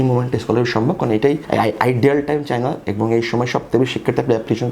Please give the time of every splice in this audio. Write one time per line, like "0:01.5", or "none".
0:01.4

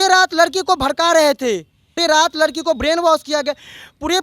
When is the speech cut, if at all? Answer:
0:01.9

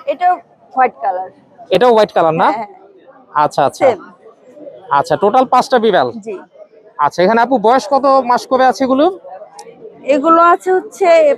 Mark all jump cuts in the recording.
none

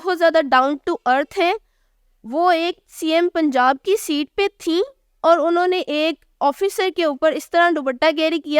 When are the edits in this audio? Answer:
none

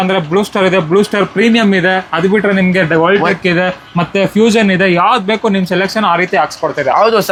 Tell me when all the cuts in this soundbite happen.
none

